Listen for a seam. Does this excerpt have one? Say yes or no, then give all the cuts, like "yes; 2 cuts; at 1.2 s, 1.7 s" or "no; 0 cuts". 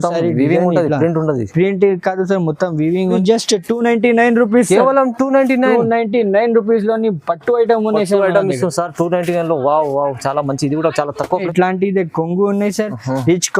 yes; 2 cuts; at 3.2 s, 11.4 s